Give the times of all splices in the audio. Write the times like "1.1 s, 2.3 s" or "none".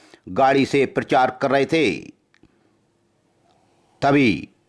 none